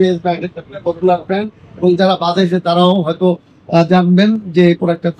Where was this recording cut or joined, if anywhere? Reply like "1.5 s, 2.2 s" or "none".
1.6 s

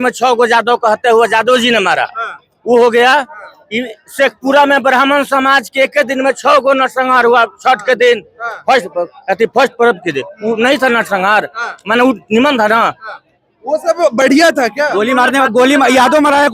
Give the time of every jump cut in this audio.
none

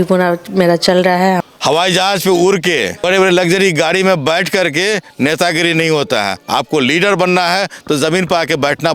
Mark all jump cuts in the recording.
1.4 s, 3.0 s

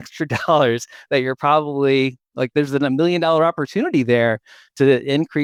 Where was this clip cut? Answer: none

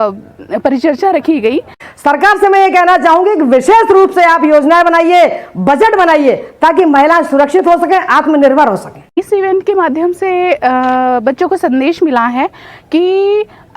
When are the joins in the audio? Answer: 1.8 s, 9.1 s

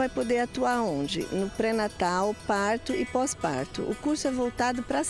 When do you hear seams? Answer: none

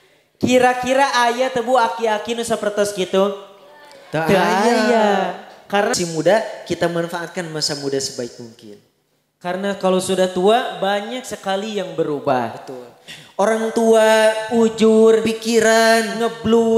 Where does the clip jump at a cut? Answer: 5.9 s

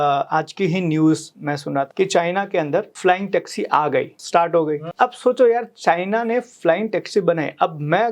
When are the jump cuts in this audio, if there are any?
1.9 s, 2.9 s, 4.2 s, 4.9 s

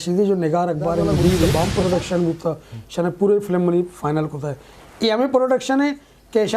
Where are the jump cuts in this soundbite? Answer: 1.5 s

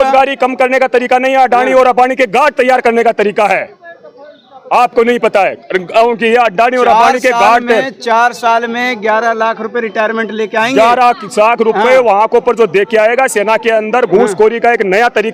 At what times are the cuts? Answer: none

